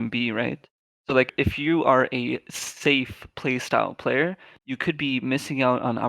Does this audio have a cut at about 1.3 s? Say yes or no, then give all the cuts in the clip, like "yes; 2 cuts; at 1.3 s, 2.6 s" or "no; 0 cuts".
yes; 1 cut; at 1.3 s